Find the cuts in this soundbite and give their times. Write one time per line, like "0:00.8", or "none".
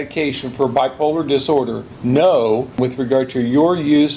0:01.9
0:02.8